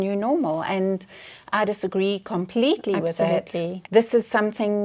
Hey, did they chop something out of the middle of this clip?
yes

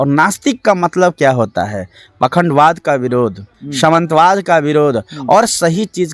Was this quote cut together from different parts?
no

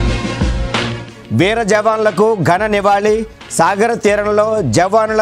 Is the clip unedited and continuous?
no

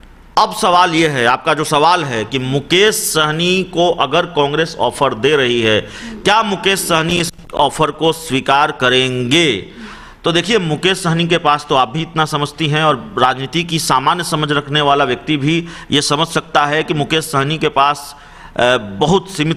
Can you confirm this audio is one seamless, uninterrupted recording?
yes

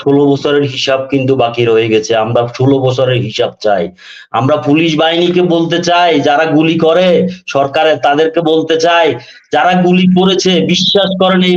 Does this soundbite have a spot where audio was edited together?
no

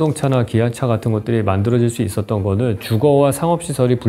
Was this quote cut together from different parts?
no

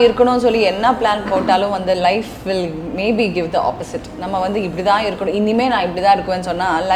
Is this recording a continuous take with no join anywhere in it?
yes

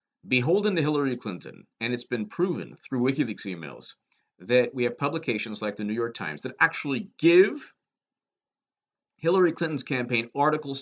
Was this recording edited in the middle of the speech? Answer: yes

